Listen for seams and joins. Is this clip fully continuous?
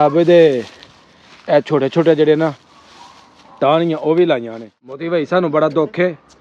no; 1 cut; at 5.0 s

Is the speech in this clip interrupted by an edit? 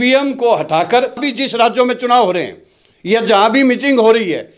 yes; 1 cut; at 1.3 s

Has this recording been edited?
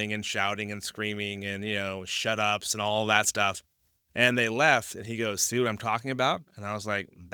no; 0 cuts

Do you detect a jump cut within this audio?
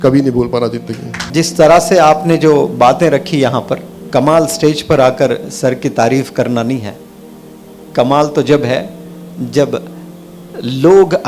yes; 2 cuts; at 1.3 s, 3.9 s

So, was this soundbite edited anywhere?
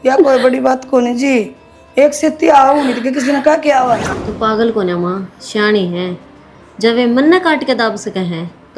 yes; 1 cut; at 4.1 s

